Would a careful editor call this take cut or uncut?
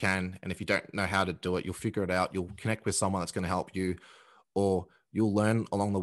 uncut